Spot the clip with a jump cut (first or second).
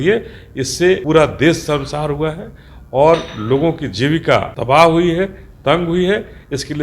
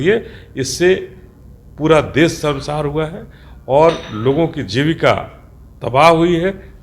first